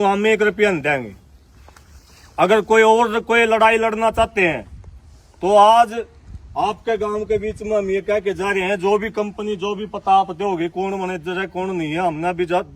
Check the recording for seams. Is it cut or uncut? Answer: uncut